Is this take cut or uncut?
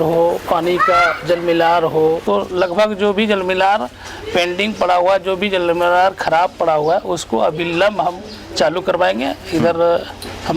cut